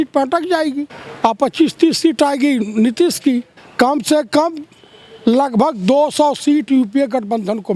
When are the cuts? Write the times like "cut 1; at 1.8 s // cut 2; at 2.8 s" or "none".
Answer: cut 1; at 1.0 s // cut 2; at 3.6 s